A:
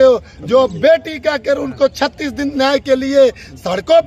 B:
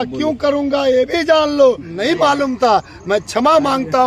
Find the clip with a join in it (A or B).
B